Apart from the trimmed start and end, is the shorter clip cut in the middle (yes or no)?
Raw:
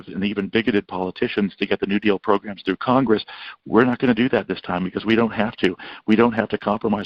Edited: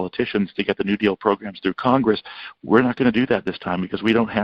no